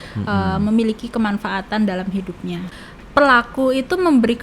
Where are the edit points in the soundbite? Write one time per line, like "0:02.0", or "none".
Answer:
0:02.7